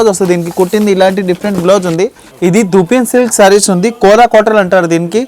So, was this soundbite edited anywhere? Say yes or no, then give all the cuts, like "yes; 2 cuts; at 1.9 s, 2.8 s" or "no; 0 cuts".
yes; 1 cut; at 2.2 s